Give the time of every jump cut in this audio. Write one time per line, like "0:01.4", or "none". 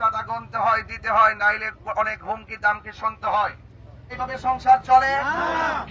0:04.1